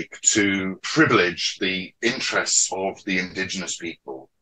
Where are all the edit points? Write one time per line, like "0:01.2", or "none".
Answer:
0:00.9
0:01.5